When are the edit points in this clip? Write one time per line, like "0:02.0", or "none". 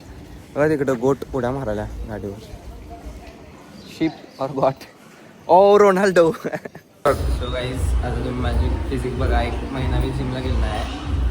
0:06.8